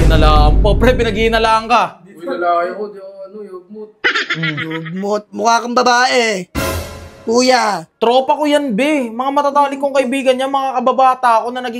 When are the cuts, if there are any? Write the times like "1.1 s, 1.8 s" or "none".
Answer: none